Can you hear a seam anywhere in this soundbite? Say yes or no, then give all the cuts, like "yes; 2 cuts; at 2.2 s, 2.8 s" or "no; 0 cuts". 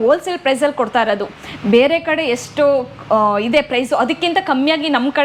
no; 0 cuts